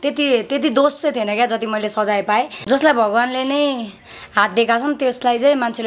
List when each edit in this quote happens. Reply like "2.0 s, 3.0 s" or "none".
2.6 s